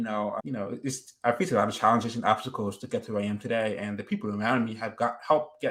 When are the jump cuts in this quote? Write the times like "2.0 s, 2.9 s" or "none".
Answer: none